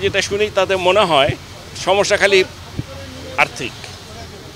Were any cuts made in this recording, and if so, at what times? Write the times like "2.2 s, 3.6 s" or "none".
none